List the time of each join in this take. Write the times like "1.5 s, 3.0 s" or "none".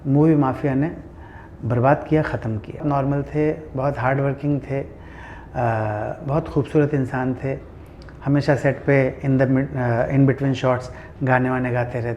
2.8 s